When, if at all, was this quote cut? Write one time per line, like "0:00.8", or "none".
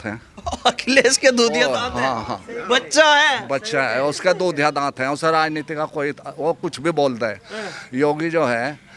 none